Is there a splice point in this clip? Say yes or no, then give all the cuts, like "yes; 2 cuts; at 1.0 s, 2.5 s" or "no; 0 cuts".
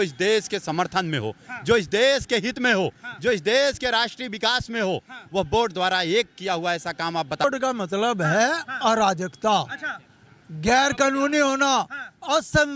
yes; 1 cut; at 7.4 s